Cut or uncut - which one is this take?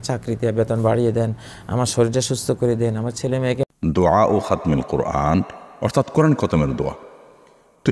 cut